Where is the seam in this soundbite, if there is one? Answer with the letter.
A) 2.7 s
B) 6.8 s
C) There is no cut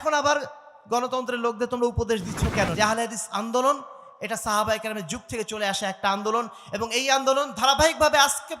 A